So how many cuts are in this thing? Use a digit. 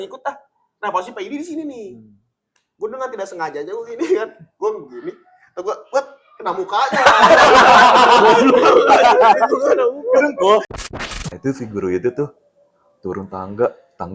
1